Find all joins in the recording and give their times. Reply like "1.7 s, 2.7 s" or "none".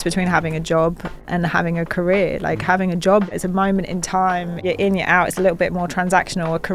1.1 s, 3.3 s, 4.6 s